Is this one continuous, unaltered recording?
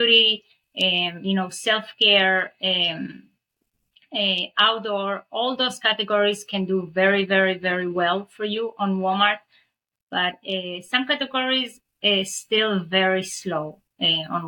yes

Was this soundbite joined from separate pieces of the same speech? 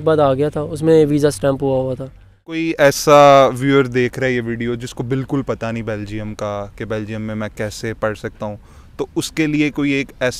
yes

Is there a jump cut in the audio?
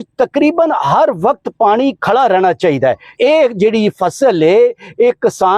yes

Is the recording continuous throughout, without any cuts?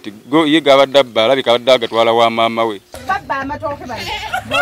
no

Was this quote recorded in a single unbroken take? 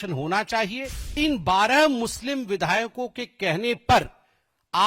no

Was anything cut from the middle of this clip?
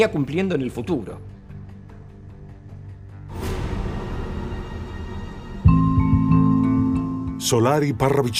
no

